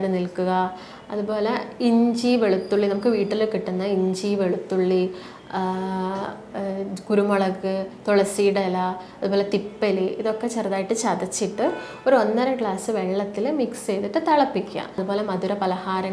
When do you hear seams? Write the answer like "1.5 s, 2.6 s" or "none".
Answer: 15.0 s